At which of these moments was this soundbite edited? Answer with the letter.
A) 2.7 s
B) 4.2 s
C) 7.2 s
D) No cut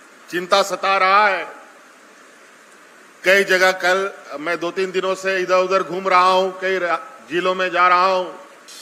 D